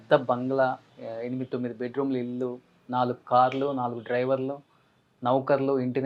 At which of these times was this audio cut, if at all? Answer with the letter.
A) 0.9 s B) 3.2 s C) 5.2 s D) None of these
A